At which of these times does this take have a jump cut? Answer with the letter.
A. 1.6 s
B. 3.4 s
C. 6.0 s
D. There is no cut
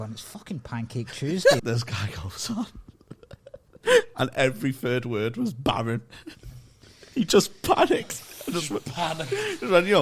A